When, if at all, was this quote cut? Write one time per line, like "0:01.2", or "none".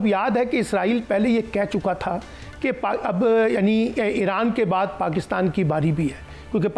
none

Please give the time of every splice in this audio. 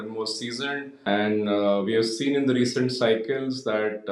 0:00.9

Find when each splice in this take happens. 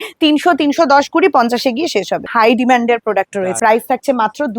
0:02.3
0:03.6

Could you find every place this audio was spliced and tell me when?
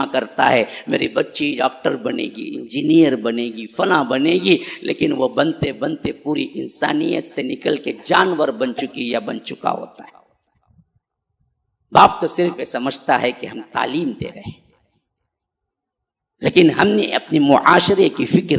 none

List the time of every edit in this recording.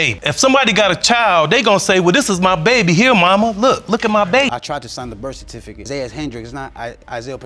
0:04.5

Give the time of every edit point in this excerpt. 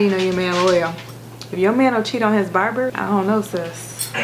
0:02.9

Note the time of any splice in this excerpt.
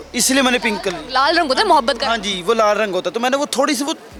none

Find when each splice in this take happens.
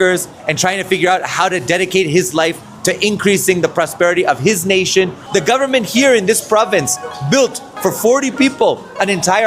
0:05.2

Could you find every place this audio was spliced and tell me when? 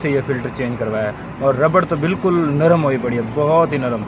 none

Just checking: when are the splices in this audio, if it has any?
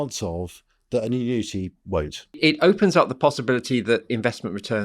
0:02.4

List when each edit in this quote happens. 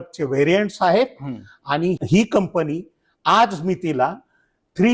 0:02.0

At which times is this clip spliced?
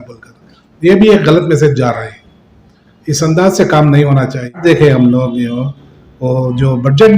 0:04.6

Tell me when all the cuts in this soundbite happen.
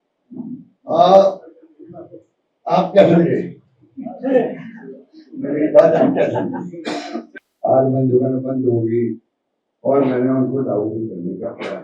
0:07.2

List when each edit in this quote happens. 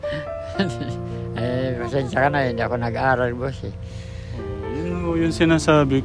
none

